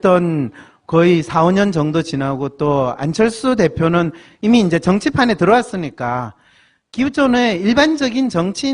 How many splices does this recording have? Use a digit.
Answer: 1